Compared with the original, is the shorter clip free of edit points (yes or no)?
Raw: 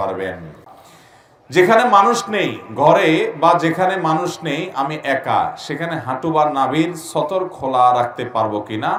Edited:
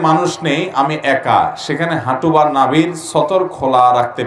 yes